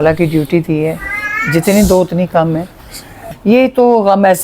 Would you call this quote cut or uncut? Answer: cut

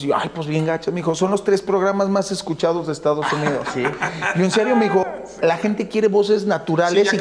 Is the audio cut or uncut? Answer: uncut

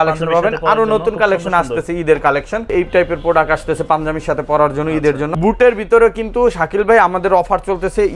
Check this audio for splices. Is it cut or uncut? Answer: cut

